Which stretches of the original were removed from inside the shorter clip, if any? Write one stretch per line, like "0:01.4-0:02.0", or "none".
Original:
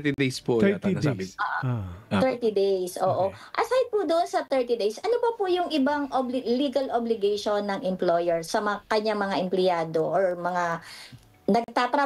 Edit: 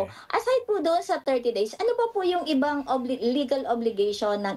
none